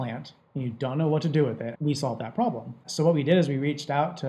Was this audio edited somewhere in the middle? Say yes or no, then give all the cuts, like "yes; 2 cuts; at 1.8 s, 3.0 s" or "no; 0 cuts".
yes; 2 cuts; at 1.7 s, 2.9 s